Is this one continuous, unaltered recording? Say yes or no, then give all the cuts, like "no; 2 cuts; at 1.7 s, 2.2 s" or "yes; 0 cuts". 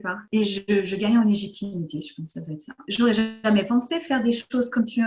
no; 1 cut; at 2.9 s